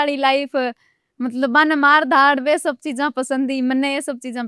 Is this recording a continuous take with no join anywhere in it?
yes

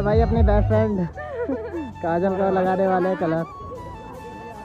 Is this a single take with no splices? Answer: no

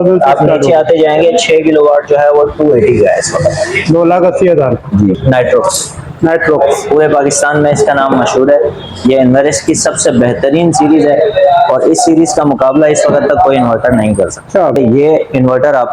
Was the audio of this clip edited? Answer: yes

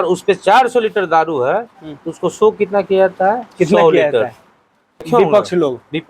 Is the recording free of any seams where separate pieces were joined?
no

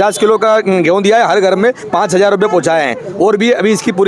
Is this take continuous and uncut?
yes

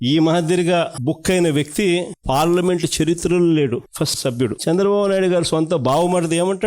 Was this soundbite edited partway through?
yes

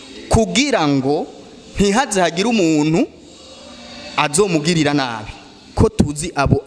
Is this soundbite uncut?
no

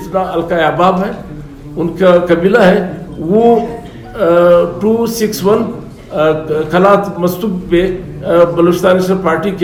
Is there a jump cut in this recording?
no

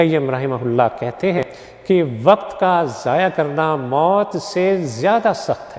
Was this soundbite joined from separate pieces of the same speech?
yes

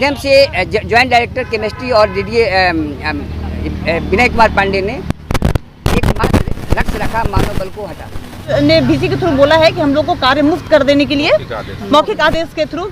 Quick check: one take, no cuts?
no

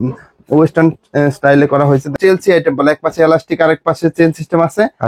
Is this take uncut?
no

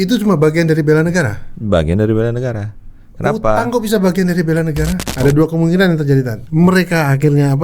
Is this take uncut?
no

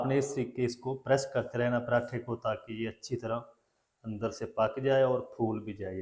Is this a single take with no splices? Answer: yes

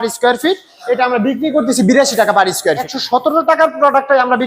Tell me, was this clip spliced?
yes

